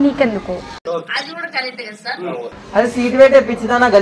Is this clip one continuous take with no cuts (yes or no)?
no